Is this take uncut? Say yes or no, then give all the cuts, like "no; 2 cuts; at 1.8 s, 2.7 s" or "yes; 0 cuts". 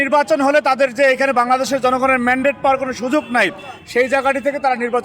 yes; 0 cuts